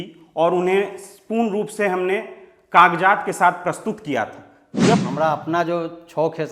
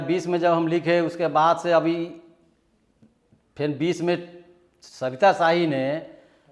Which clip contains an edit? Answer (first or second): first